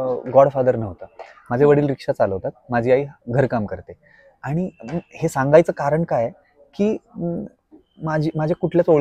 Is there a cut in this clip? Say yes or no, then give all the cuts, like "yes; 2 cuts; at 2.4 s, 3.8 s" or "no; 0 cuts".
no; 0 cuts